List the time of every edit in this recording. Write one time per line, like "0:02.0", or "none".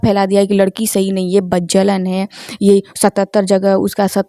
none